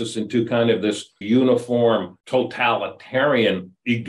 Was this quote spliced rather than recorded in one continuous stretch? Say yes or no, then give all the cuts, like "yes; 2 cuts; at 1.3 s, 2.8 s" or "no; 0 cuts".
yes; 2 cuts; at 1.2 s, 2.2 s